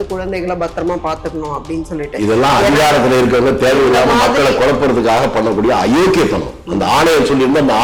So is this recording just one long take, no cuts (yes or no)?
yes